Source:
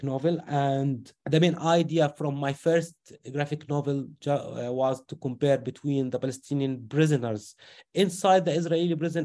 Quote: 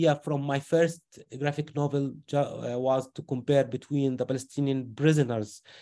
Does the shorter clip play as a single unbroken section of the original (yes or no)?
yes